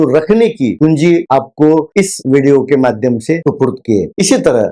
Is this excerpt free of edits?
no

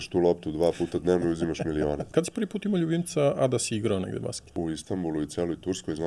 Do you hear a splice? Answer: yes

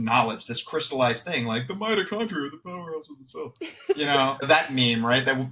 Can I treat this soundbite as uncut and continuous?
no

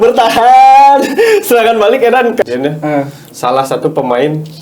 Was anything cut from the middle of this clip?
yes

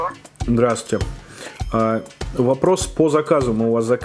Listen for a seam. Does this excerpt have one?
no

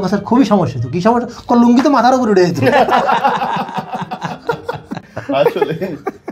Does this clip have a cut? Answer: no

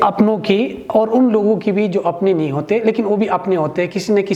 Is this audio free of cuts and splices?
yes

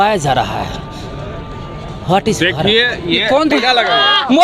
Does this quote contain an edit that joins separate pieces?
yes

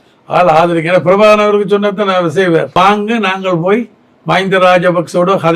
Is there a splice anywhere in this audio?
yes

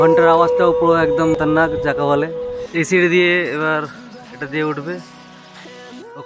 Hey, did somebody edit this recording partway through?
yes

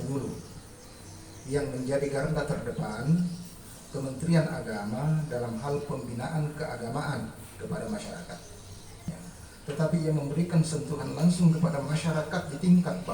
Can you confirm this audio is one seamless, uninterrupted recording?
no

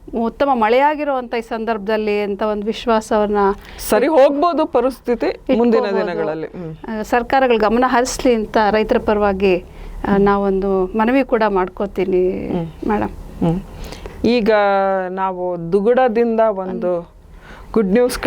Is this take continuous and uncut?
yes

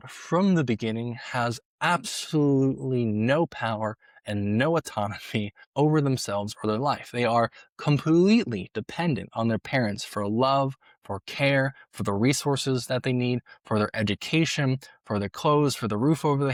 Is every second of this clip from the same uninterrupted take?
yes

